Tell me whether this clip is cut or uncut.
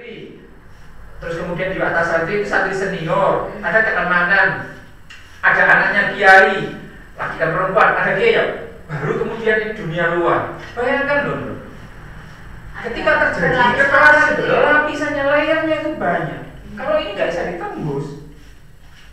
uncut